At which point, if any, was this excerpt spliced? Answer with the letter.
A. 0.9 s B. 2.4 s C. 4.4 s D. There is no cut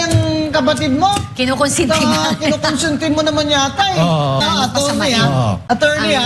C